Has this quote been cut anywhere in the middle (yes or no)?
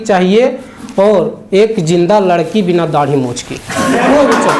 no